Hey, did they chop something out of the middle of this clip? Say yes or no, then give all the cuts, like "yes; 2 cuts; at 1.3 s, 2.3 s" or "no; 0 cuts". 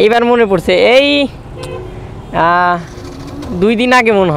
no; 0 cuts